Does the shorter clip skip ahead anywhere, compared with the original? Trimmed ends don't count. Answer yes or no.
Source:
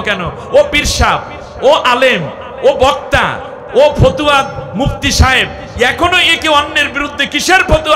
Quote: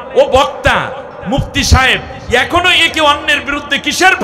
yes